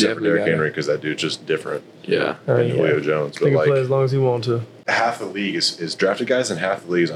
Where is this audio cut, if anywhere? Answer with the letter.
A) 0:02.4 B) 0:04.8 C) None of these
B